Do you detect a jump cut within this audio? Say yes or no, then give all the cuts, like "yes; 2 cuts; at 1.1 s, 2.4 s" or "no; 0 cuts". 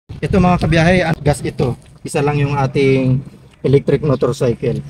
yes; 1 cut; at 1.1 s